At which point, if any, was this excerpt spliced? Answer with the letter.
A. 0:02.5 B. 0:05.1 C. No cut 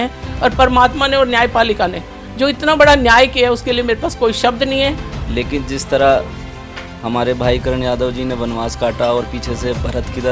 B